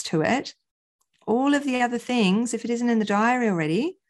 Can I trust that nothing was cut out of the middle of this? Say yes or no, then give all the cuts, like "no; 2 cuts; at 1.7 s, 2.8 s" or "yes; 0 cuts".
yes; 0 cuts